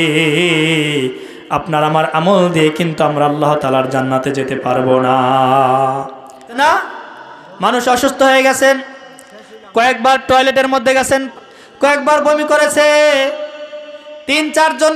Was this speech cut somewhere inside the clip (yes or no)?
yes